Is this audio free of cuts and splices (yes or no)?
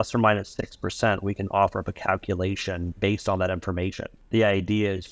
no